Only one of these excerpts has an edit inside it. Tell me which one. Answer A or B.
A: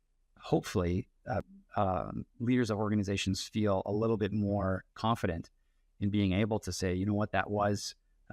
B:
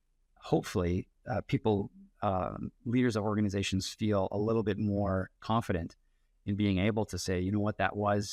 A